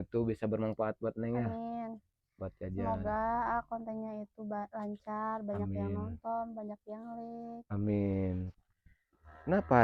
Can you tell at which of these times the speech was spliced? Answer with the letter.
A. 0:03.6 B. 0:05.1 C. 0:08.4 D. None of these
C